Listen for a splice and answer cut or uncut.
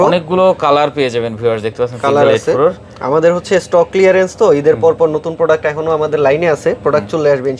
uncut